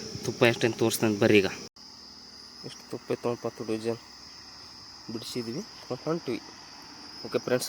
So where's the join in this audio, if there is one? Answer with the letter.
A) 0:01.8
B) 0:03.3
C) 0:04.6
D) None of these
A